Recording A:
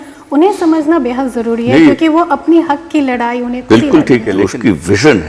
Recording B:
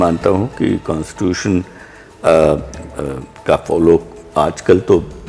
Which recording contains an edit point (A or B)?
A